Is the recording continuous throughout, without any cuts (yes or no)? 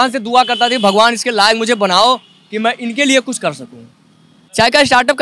no